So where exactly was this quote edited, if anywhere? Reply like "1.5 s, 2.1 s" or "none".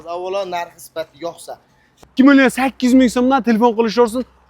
2.0 s